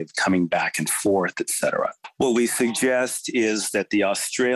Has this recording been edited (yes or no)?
yes